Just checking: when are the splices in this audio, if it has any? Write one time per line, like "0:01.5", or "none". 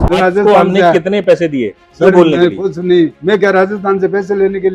none